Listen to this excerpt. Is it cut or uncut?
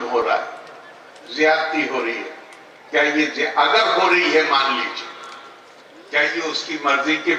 uncut